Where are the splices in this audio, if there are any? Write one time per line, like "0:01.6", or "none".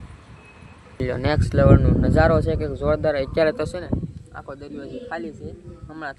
0:01.0